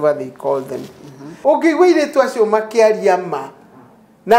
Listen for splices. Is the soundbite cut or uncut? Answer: cut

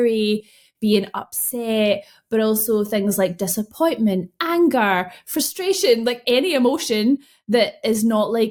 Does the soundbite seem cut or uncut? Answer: uncut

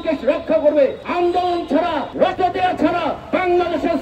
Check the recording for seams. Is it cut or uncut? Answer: cut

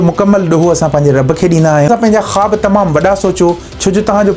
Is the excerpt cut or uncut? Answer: cut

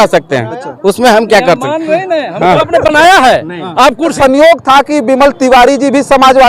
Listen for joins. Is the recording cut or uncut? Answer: cut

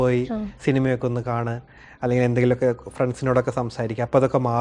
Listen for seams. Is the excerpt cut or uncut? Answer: uncut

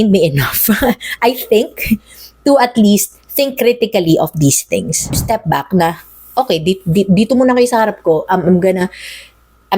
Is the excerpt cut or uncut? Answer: cut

